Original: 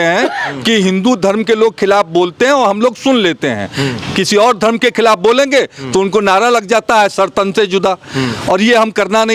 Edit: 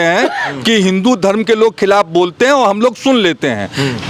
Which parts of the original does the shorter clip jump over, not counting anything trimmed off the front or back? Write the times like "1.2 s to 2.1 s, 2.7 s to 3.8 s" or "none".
none